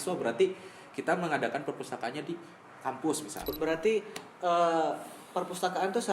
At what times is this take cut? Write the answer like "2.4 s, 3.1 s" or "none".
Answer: 3.5 s